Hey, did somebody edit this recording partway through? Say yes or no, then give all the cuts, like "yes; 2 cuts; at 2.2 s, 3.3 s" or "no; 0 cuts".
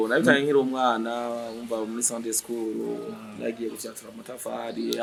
no; 0 cuts